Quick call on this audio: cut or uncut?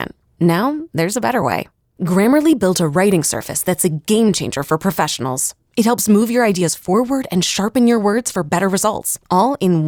uncut